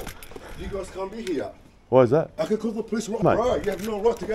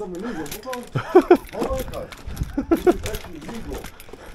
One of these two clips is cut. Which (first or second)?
first